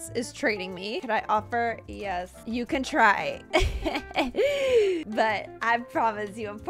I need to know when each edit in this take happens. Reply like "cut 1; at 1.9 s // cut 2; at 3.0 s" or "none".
cut 1; at 1.0 s // cut 2; at 2.4 s // cut 3; at 5.1 s